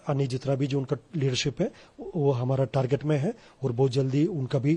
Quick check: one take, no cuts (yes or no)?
yes